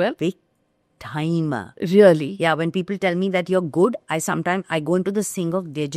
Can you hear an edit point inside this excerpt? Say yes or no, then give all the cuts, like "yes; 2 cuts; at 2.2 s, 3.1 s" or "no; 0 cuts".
no; 0 cuts